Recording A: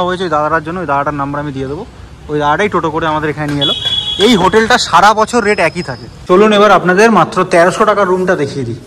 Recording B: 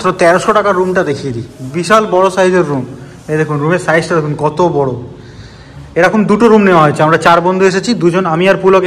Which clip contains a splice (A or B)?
A